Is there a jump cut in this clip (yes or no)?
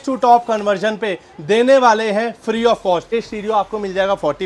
yes